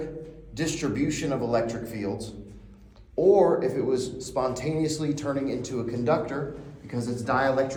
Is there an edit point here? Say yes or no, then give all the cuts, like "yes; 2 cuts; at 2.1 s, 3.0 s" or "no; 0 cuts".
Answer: no; 0 cuts